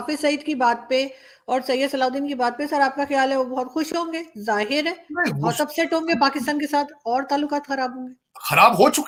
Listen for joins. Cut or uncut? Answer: uncut